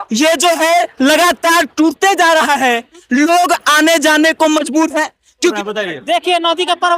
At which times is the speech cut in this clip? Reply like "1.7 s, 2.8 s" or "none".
5.6 s